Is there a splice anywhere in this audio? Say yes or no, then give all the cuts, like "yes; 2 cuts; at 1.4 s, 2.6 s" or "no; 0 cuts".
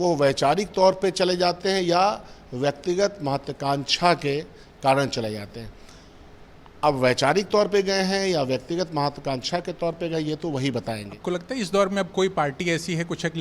yes; 1 cut; at 11.1 s